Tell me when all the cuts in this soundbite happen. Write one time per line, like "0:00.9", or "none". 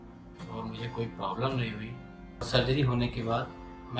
0:02.5